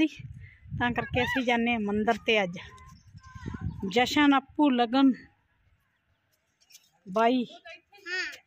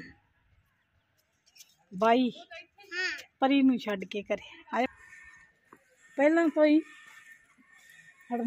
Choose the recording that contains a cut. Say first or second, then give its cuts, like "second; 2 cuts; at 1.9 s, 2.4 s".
second; 1 cut; at 4.9 s